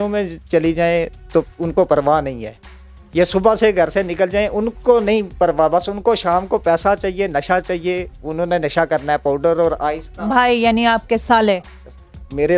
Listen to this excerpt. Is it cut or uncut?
uncut